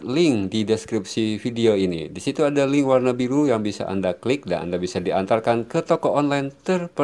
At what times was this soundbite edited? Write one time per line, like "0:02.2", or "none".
none